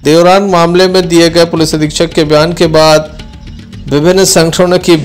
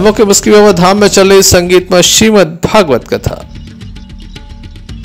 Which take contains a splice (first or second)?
second